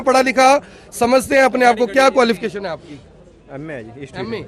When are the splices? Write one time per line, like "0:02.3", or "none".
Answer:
none